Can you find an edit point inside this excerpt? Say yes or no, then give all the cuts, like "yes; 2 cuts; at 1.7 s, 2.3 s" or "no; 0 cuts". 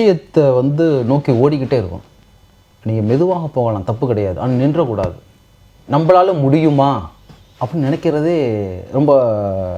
no; 0 cuts